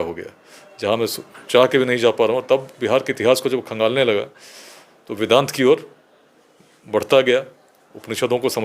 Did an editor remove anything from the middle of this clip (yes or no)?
no